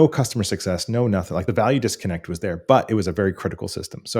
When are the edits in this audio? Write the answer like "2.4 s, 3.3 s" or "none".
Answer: 1.4 s